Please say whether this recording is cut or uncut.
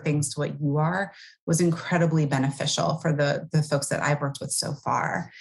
uncut